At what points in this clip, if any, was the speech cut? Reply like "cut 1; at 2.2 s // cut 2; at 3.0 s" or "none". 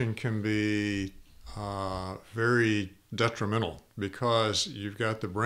none